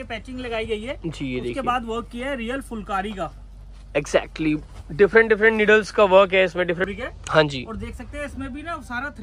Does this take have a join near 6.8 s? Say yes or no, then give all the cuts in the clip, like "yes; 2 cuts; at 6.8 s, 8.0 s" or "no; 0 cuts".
yes; 1 cut; at 6.8 s